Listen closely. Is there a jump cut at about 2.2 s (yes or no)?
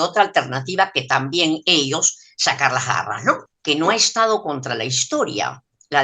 no